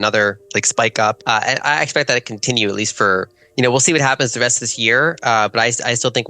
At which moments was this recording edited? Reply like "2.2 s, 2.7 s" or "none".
1.2 s